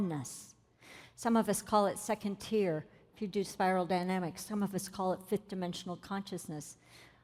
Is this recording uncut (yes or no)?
yes